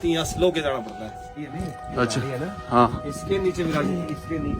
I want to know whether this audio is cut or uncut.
cut